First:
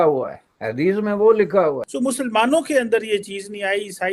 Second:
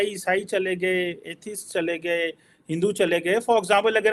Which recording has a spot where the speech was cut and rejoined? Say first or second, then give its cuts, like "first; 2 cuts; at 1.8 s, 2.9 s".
first; 1 cut; at 1.9 s